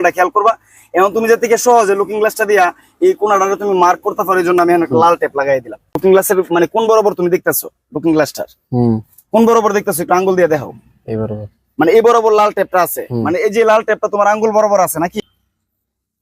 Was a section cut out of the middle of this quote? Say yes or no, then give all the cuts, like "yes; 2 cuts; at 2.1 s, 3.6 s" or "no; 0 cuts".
yes; 2 cuts; at 6.0 s, 15.2 s